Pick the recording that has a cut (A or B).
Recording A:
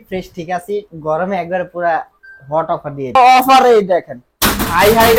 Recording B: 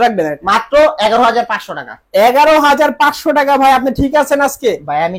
A